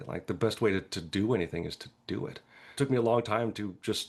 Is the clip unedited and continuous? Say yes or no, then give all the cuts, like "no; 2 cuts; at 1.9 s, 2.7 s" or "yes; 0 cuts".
no; 1 cut; at 2.7 s